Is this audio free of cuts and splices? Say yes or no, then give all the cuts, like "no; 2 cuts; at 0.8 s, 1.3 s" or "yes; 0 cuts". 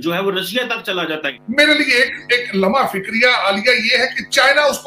no; 1 cut; at 1.1 s